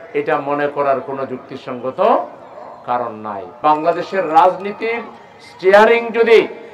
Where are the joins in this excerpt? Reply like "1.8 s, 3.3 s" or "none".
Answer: 3.6 s